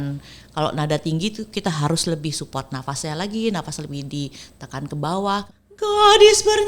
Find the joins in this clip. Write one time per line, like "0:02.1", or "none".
0:05.5